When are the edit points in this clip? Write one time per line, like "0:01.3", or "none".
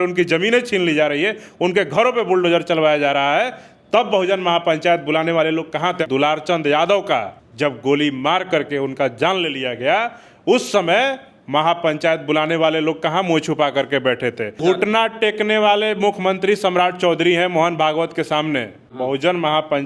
0:06.0
0:07.4
0:14.6
0:18.8